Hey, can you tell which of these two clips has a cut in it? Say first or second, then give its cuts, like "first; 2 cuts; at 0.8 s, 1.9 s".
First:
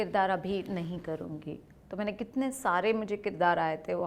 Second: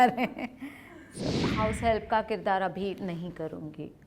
second; 1 cut; at 1.2 s